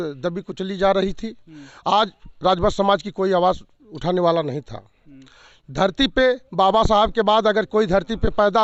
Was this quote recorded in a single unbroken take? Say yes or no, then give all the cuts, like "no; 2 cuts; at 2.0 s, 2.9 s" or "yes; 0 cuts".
yes; 0 cuts